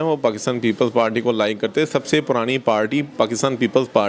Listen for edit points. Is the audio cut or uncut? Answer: uncut